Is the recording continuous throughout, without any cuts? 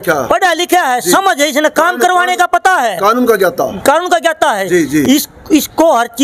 yes; 0 cuts

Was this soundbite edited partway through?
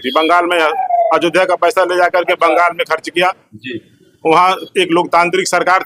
no; 0 cuts

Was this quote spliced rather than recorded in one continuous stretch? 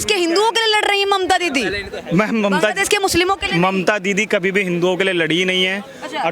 no; 0 cuts

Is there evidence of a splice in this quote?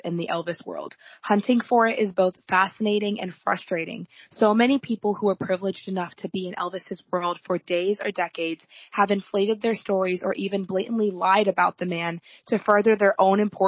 no; 0 cuts

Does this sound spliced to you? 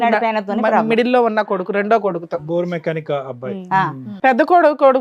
yes; 1 cut; at 4.1 s

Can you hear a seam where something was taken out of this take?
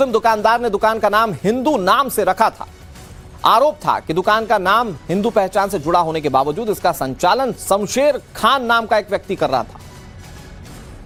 no; 0 cuts

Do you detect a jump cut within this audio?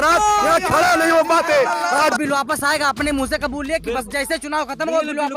yes; 1 cut; at 2.2 s

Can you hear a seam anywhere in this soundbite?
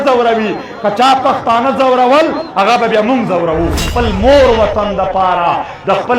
yes; 1 cut; at 3.9 s

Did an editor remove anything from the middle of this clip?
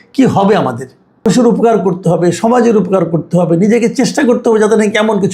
yes; 1 cut; at 1.2 s

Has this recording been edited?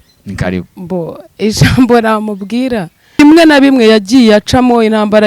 yes; 1 cut; at 3.2 s

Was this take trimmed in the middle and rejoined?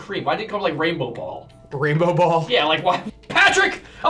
yes; 1 cut; at 3.0 s

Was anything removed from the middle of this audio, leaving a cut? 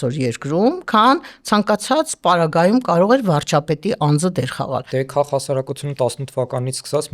yes; 1 cut; at 4.9 s

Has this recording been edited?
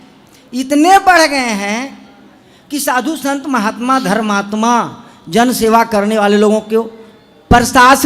no; 0 cuts

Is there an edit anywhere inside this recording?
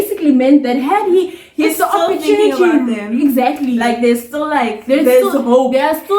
no; 0 cuts

